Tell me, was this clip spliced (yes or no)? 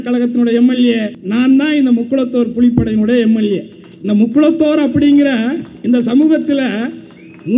yes